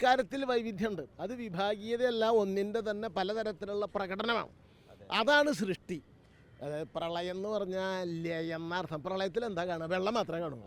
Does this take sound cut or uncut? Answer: uncut